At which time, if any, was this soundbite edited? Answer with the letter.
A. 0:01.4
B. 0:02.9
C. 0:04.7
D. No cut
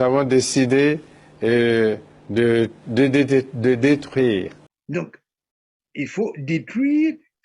C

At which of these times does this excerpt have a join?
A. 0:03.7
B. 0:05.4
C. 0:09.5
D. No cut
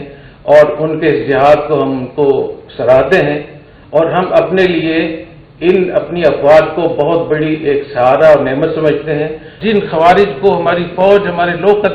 C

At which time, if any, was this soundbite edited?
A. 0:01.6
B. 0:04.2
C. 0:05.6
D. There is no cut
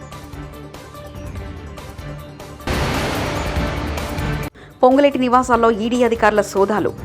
A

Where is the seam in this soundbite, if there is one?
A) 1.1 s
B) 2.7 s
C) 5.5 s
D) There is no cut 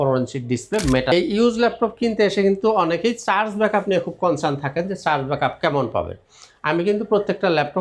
A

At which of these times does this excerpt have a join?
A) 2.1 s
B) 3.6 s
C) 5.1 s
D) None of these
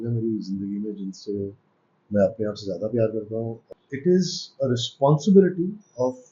B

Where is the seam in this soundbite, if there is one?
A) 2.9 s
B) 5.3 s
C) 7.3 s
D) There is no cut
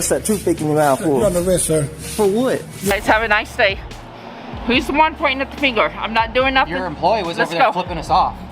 A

